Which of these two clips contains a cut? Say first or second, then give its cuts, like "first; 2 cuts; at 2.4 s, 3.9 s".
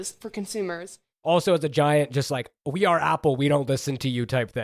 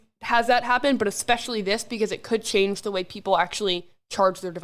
first; 1 cut; at 1.0 s